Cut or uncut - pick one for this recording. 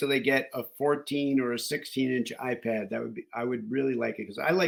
uncut